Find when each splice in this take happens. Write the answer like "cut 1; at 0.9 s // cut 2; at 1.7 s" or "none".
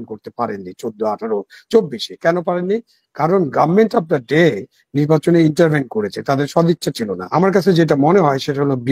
cut 1; at 7.1 s

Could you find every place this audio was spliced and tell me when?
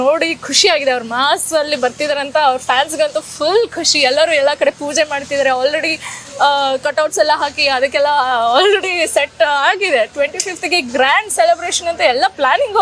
none

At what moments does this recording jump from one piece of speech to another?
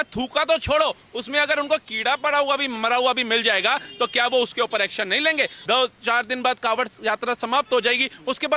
cut 1; at 5.6 s

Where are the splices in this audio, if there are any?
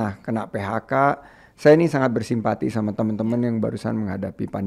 none

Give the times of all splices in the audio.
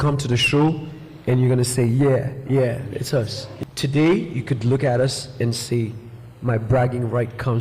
cut 1; at 3.4 s

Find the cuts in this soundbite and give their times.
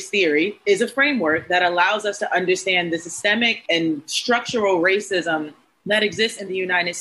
none

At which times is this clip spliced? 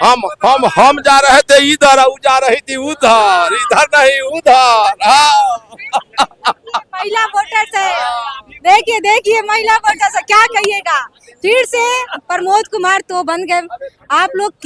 none

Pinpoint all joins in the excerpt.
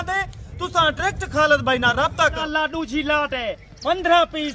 cut 1; at 2.4 s

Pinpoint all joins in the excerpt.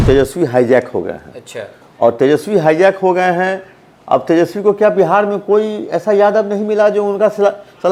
none

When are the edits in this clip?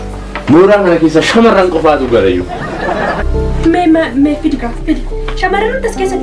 cut 1; at 3.2 s

